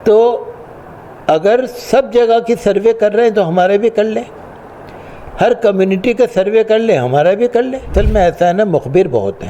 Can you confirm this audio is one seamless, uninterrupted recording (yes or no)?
no